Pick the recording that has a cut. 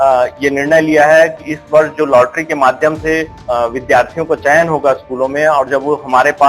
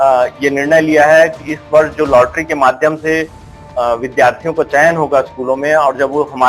first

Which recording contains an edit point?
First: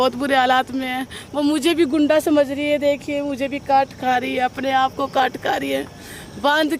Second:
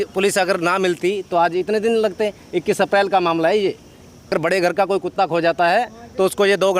second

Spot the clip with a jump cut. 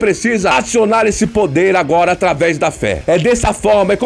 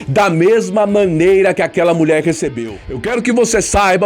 second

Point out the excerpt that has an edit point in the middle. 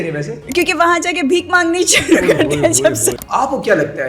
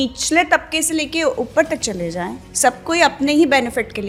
first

